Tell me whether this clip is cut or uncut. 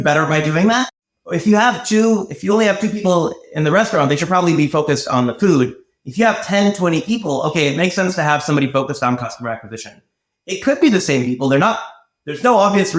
cut